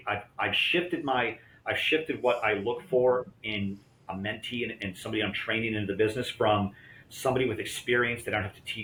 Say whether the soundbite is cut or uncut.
uncut